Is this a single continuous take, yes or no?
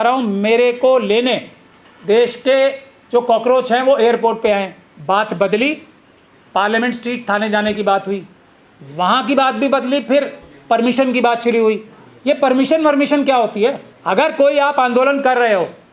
no